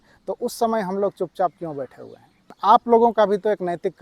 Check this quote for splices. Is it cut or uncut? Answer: cut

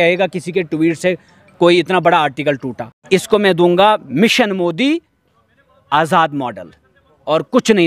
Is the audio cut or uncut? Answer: cut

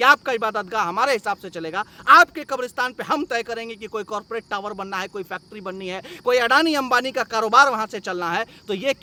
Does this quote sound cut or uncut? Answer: uncut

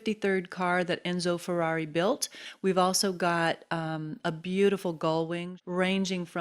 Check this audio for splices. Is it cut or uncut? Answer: cut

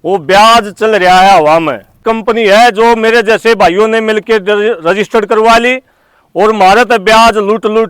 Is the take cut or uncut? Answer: cut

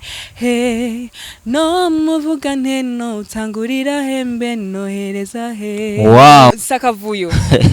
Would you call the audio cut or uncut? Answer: cut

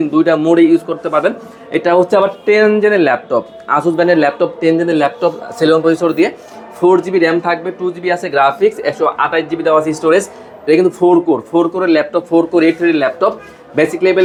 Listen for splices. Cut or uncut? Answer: uncut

